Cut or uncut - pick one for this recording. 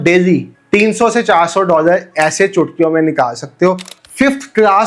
cut